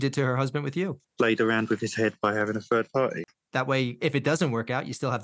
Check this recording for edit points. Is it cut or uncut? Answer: cut